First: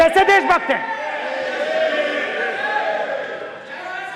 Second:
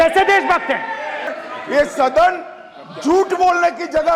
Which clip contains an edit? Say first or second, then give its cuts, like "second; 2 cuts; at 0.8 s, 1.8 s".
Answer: second; 1 cut; at 1.4 s